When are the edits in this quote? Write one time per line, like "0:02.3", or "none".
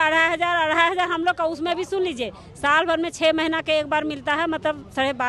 none

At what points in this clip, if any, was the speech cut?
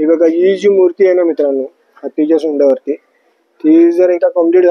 none

